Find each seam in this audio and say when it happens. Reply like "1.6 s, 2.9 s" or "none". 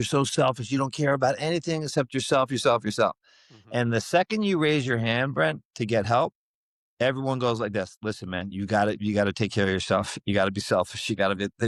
none